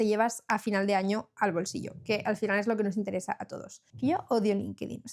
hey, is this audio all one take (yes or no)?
no